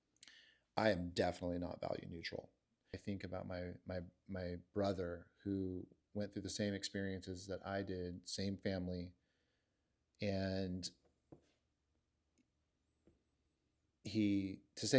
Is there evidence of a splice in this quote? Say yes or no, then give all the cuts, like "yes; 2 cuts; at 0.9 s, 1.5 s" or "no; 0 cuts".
yes; 1 cut; at 3.0 s